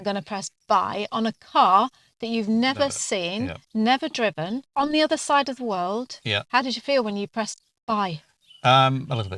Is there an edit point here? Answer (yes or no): yes